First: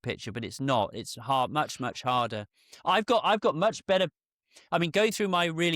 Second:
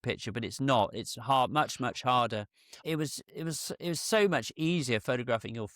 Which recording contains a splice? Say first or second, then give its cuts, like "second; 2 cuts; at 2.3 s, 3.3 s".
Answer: second; 1 cut; at 2.8 s